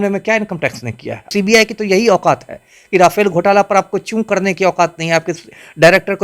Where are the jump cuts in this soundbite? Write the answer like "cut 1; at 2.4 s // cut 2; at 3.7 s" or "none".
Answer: cut 1; at 1.2 s